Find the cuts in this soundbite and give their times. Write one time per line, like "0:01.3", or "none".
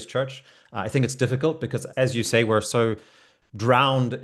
0:01.9